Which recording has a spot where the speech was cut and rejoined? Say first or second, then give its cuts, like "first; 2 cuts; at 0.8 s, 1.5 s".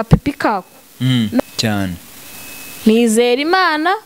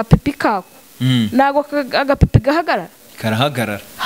first; 1 cut; at 1.4 s